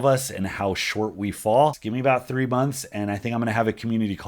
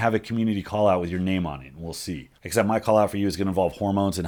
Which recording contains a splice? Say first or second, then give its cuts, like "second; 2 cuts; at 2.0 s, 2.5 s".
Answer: first; 1 cut; at 1.9 s